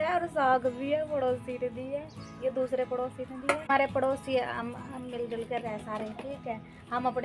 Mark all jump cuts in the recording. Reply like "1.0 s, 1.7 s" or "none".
3.7 s